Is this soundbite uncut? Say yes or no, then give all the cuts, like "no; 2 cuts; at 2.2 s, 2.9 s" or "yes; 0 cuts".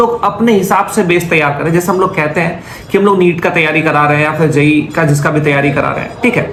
yes; 0 cuts